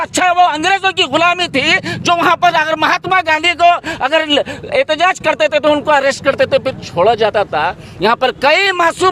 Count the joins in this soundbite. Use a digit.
0